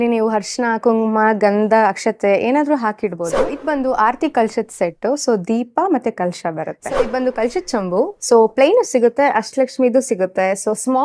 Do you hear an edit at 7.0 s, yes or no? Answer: yes